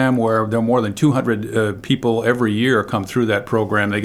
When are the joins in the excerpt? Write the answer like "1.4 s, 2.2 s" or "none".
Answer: none